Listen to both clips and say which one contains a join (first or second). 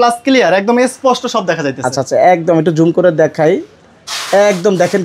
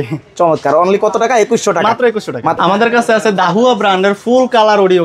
second